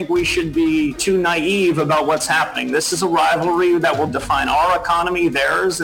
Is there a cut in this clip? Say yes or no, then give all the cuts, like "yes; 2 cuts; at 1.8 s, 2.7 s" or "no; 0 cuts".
yes; 1 cut; at 1.0 s